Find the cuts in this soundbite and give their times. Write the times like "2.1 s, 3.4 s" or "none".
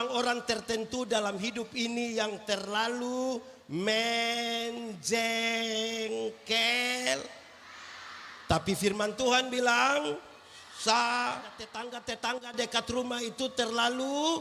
11.9 s